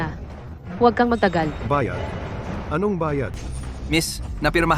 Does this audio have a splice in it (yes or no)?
yes